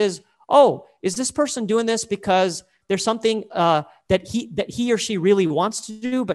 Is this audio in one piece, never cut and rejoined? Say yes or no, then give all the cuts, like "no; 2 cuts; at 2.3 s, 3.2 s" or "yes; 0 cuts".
no; 1 cut; at 2.7 s